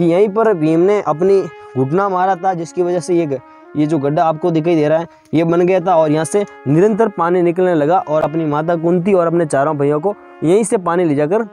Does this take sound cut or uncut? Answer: uncut